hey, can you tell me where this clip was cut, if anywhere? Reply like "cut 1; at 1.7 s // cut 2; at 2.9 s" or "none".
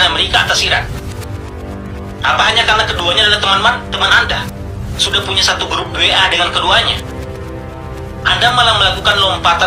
none